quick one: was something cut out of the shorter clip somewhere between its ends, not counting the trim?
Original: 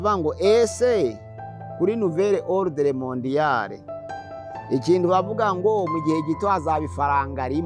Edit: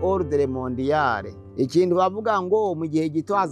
yes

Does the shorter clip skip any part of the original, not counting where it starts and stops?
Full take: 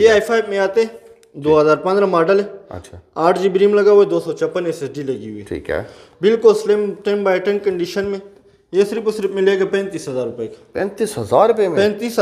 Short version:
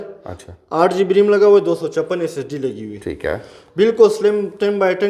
no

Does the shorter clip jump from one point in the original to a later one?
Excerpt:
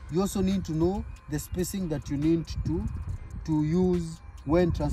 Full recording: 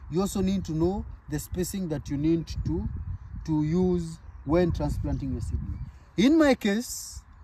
no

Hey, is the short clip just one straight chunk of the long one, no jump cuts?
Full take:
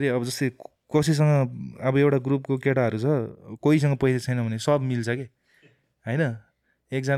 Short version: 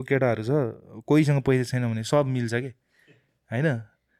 yes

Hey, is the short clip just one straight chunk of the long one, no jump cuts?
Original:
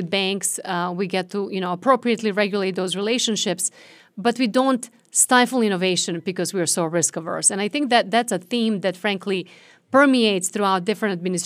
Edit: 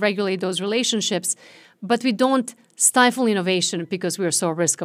yes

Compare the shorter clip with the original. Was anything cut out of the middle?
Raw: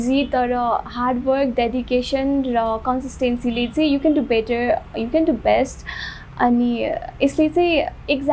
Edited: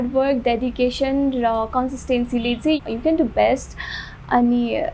yes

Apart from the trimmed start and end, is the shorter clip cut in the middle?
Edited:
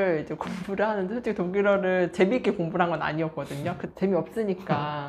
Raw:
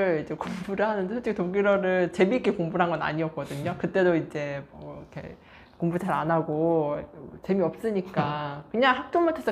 yes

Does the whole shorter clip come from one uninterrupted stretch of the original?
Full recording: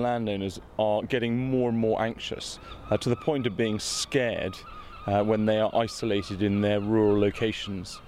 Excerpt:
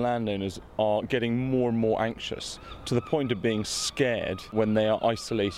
no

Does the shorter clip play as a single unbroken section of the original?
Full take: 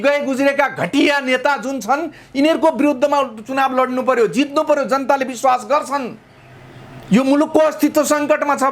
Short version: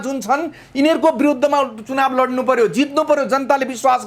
yes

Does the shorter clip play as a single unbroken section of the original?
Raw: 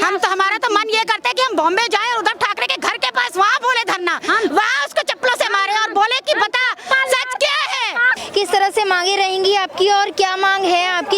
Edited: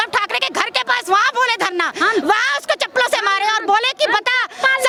yes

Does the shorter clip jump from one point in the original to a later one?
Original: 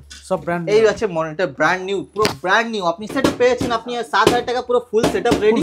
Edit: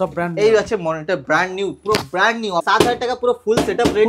yes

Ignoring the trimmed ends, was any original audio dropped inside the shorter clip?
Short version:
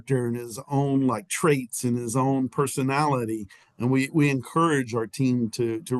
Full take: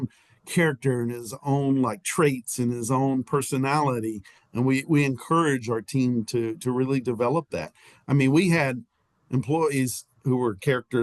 no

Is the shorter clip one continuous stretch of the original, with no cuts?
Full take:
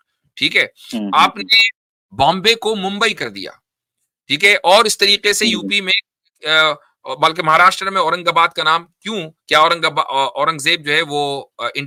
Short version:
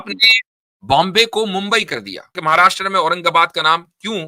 no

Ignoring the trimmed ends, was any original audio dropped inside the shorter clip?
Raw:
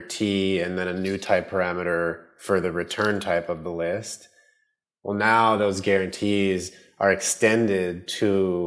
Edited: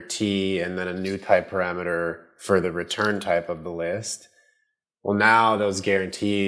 no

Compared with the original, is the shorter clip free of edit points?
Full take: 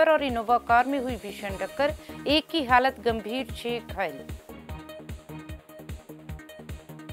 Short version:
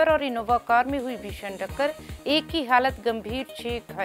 yes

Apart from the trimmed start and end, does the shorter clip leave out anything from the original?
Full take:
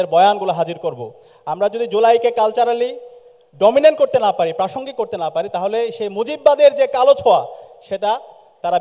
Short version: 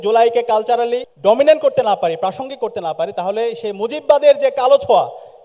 yes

